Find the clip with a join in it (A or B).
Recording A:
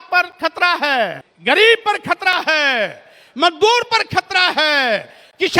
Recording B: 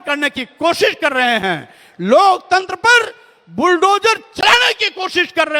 A